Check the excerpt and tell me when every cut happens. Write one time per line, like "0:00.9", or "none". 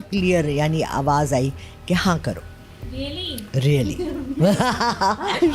none